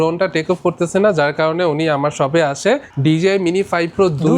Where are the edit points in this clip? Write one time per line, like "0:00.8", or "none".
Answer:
0:02.9